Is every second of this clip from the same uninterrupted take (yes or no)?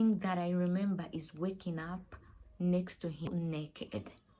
no